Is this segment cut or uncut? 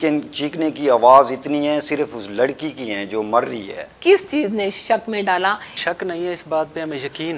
cut